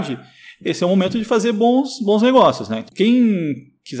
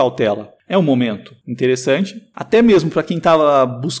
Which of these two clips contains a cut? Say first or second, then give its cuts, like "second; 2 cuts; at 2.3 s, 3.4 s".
first; 1 cut; at 2.9 s